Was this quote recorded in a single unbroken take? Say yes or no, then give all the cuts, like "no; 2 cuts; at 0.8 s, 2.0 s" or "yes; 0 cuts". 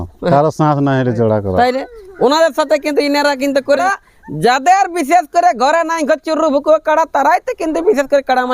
no; 1 cut; at 3.8 s